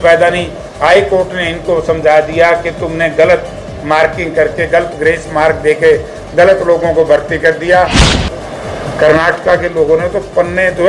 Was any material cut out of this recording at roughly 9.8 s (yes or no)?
no